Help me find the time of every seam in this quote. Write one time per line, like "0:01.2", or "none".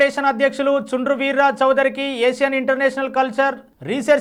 none